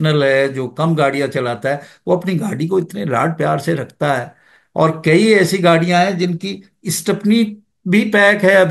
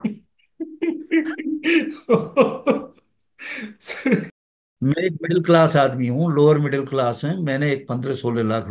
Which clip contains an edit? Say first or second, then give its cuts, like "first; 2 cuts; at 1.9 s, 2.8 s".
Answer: second; 1 cut; at 4.3 s